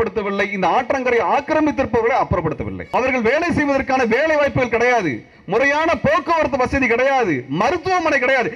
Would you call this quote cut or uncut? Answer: cut